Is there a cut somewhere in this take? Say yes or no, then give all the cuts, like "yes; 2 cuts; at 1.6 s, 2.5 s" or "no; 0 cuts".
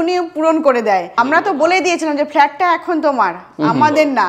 yes; 1 cut; at 1.1 s